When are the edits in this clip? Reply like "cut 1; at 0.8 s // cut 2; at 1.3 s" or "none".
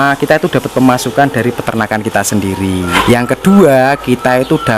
cut 1; at 2.9 s